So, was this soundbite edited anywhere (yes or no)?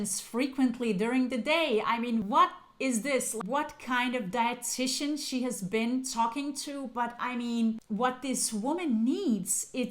yes